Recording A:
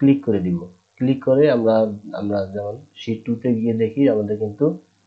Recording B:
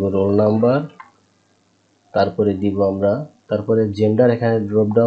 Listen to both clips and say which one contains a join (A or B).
B